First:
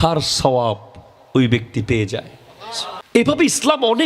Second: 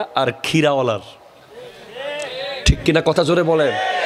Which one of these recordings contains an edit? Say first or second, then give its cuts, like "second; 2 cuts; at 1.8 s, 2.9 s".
first; 1 cut; at 3.2 s